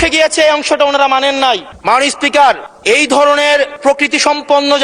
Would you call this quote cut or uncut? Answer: cut